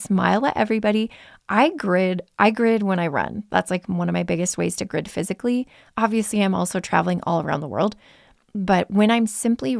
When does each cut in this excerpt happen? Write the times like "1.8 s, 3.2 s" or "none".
none